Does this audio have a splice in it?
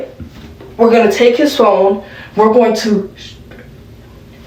no; 0 cuts

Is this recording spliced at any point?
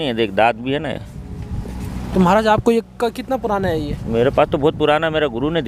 no; 0 cuts

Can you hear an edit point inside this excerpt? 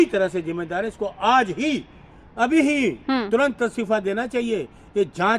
no; 0 cuts

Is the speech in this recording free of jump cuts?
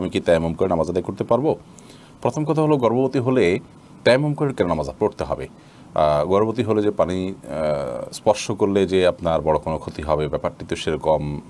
yes; 0 cuts

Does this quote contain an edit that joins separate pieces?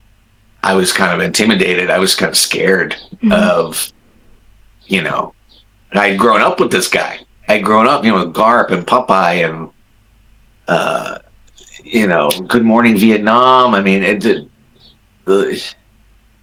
no; 0 cuts

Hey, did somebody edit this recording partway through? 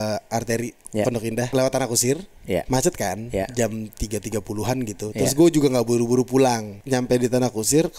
yes; 2 cuts; at 1.5 s, 6.7 s

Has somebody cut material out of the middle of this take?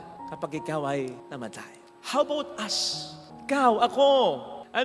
no; 0 cuts

